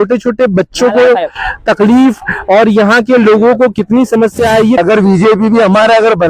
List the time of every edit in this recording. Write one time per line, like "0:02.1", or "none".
0:04.8